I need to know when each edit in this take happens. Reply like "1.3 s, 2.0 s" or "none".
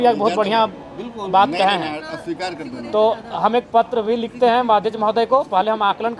none